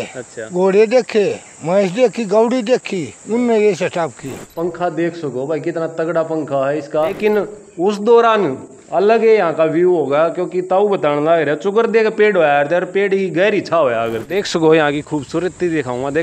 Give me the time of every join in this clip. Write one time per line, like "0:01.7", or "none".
0:04.4
0:07.2
0:14.3